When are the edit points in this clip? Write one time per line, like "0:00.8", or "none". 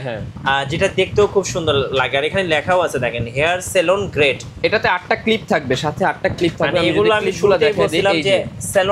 none